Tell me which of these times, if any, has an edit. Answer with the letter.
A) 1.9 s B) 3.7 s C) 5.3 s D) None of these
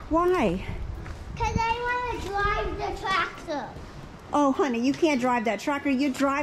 D